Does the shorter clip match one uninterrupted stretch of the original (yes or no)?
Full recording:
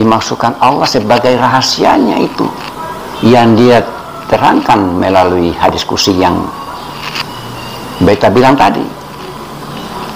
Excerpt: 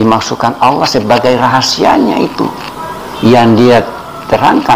yes